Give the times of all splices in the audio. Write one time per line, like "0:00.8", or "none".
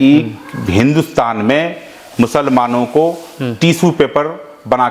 none